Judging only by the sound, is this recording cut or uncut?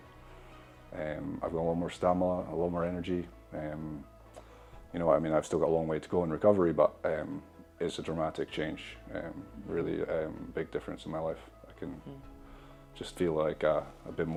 uncut